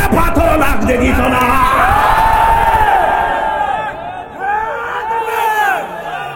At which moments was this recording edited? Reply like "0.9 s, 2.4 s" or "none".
none